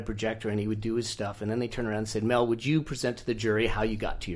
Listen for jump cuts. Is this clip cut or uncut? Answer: uncut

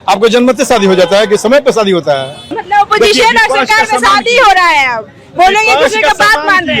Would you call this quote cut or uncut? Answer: cut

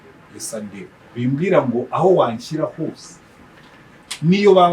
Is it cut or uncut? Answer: cut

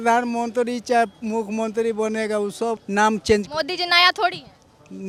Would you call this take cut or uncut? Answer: uncut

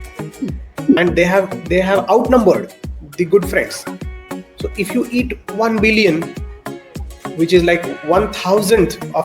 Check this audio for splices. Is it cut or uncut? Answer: cut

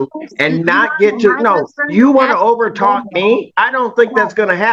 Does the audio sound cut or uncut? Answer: uncut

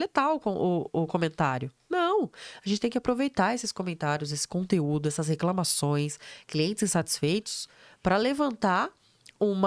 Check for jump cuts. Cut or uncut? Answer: uncut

